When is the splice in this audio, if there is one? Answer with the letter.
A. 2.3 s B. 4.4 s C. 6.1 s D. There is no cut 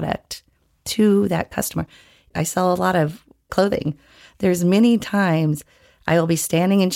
A